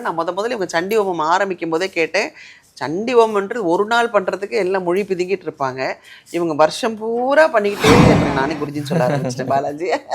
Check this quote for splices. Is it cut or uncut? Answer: cut